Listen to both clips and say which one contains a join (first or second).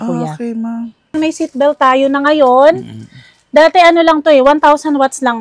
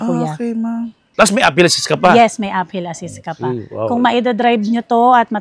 first